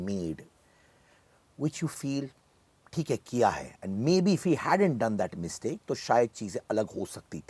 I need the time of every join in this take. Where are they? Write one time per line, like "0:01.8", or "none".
none

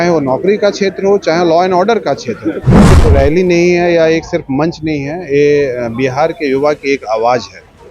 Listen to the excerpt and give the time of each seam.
0:02.8

